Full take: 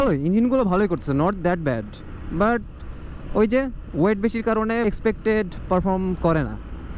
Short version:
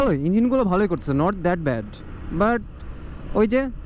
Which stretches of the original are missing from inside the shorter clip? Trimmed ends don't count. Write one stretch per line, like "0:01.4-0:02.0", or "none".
none